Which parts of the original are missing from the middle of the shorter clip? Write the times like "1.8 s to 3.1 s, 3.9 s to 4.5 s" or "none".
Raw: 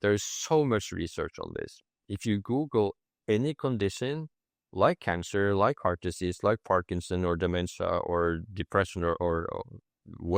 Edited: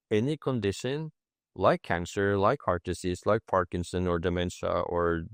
none